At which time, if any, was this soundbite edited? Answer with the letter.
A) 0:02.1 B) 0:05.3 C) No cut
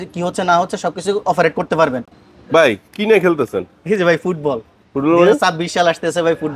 A